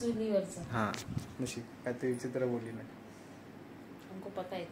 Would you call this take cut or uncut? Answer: uncut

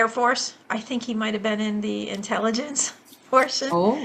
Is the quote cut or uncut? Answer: uncut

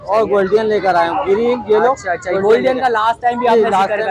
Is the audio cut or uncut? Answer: uncut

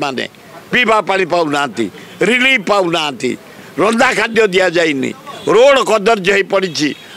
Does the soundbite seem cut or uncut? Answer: uncut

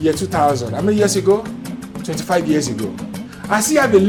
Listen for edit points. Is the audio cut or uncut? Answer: uncut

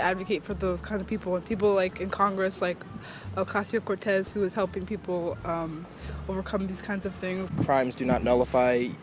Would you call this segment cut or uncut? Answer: cut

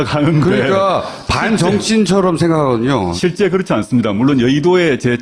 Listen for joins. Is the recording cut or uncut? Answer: cut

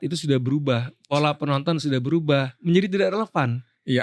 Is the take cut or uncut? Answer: cut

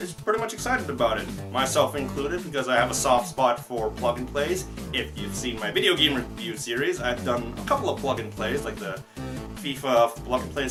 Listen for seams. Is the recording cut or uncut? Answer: uncut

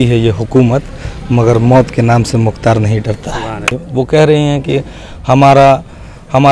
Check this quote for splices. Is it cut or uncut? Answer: cut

